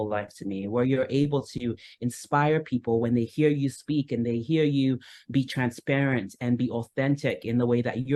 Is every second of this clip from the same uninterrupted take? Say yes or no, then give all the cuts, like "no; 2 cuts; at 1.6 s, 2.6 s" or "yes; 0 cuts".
yes; 0 cuts